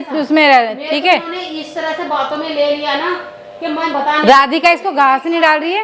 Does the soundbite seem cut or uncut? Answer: uncut